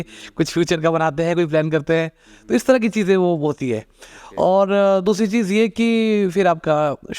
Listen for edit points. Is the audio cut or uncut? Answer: uncut